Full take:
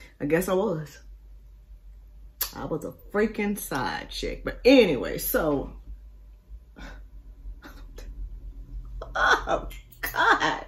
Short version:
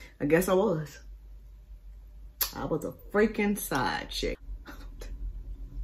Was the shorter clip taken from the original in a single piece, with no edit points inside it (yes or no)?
no